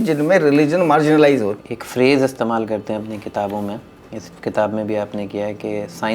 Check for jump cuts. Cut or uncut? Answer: cut